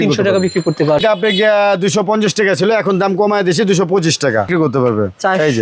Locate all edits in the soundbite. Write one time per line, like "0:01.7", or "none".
0:01.0
0:04.5